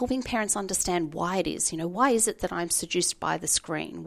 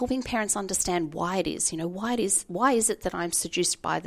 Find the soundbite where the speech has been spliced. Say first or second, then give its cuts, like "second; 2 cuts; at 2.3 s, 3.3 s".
first; 1 cut; at 1.9 s